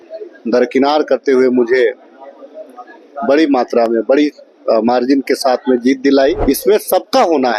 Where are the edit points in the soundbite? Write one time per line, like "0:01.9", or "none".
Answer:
0:06.4